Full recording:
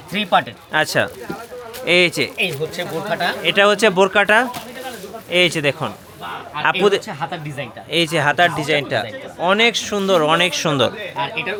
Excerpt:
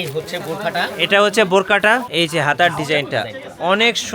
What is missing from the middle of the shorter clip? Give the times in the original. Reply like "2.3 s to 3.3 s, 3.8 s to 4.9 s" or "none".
4.5 s to 7.9 s